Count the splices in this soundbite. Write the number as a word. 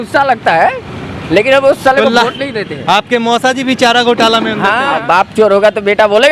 one